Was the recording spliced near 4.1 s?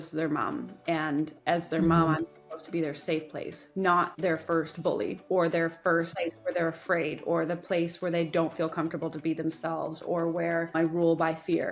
yes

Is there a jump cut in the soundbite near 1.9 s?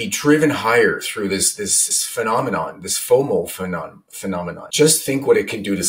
yes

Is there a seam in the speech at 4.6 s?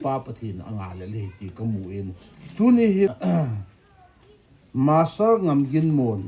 no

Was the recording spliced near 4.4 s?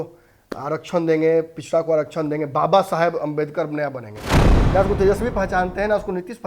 yes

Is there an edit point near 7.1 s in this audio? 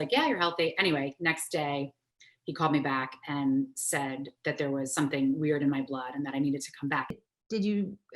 yes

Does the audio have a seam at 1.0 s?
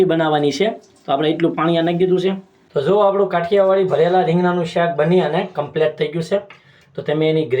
no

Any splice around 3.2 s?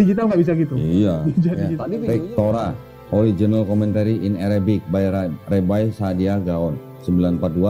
no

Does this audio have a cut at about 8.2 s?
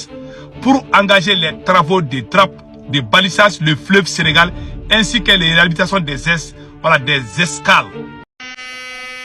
yes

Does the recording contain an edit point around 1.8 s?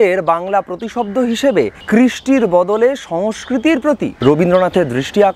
yes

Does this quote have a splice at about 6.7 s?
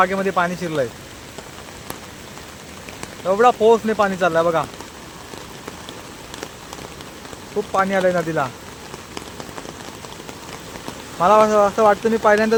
no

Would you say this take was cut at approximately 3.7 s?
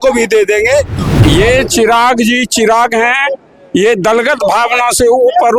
no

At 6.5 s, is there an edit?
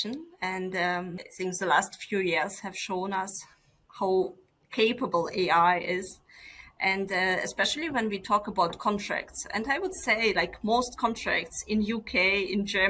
no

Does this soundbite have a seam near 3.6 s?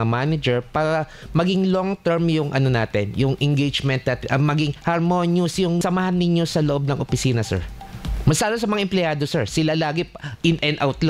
no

